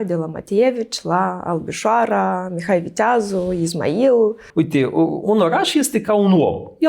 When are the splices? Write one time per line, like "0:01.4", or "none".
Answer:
0:04.4